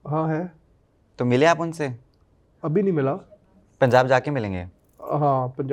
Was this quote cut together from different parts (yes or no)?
no